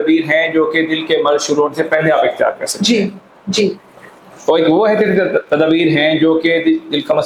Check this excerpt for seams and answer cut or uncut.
uncut